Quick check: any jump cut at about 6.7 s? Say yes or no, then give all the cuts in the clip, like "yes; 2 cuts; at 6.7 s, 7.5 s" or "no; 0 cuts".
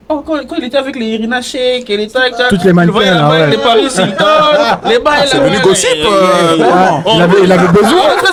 no; 0 cuts